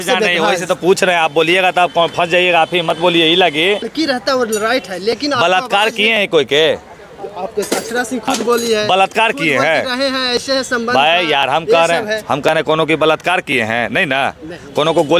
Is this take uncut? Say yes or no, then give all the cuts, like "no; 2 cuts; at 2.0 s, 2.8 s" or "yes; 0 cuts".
no; 1 cut; at 3.9 s